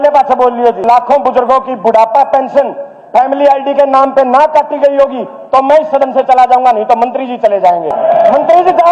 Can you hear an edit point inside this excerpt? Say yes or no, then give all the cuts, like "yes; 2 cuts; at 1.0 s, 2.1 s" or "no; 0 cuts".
yes; 2 cuts; at 0.8 s, 7.9 s